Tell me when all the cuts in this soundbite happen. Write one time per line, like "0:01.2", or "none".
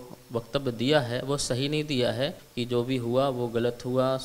0:02.4